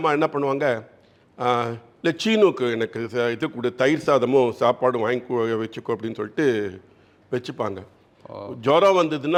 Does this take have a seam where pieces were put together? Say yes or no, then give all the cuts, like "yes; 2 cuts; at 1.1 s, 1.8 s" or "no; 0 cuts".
no; 0 cuts